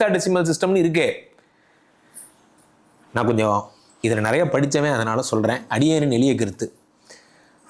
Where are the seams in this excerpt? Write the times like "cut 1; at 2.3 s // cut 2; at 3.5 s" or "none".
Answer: none